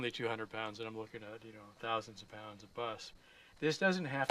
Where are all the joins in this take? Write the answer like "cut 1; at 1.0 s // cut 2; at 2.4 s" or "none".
cut 1; at 3.1 s